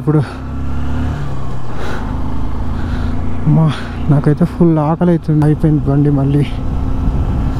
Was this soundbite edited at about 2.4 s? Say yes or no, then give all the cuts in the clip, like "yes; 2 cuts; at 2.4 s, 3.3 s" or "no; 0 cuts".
no; 1 cut; at 5.4 s